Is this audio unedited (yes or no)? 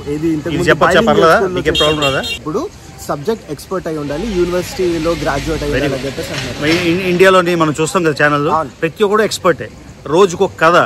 no